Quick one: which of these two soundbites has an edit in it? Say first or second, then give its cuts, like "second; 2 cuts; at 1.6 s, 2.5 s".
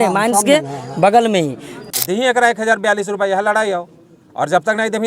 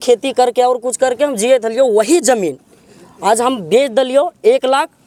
first; 1 cut; at 1.7 s